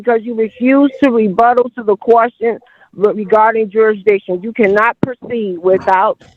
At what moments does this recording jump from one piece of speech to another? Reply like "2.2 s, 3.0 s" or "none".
none